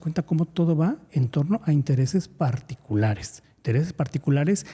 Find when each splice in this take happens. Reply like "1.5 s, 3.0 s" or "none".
none